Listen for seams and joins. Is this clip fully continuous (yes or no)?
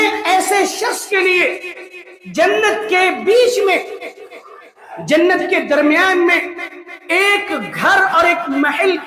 yes